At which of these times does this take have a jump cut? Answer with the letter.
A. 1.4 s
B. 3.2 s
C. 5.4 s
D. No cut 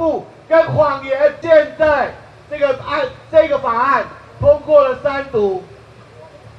A